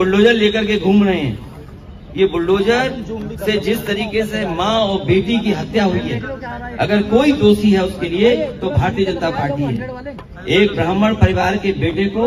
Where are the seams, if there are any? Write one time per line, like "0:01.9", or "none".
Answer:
none